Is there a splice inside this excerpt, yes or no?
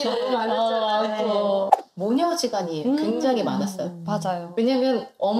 yes